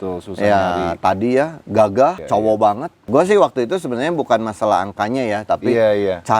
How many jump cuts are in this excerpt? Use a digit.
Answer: 2